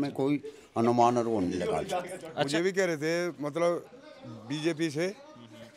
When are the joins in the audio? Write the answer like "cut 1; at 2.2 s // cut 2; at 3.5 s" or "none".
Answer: cut 1; at 2.5 s